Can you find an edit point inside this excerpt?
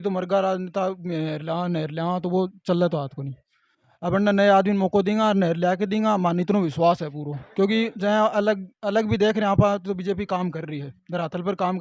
no; 0 cuts

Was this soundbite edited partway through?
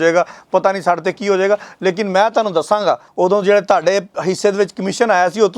yes; 1 cut; at 3.1 s

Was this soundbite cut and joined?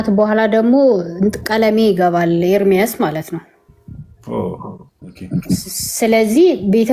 no; 0 cuts

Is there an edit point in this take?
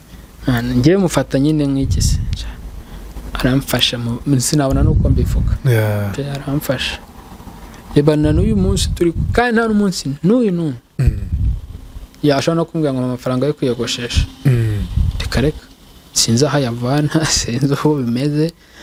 no; 0 cuts

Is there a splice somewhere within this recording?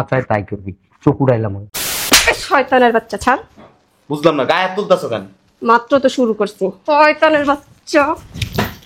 yes; 2 cuts; at 1.9 s, 6.8 s

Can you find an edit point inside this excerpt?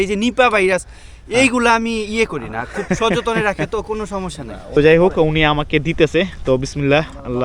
yes; 1 cut; at 4.8 s

